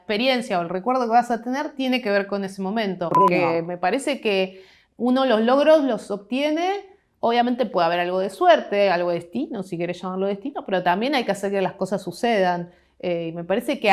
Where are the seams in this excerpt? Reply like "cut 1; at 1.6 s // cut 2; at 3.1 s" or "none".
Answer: cut 1; at 3.1 s